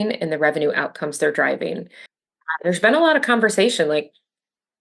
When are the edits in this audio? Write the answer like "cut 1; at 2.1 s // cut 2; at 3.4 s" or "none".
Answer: cut 1; at 2.2 s